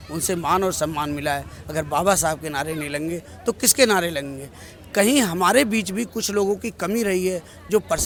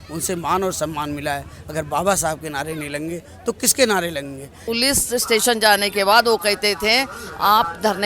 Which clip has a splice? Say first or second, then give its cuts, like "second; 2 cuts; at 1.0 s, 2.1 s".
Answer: second; 1 cut; at 4.5 s